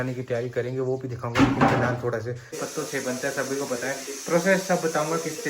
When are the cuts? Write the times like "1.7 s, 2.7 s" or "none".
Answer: 2.6 s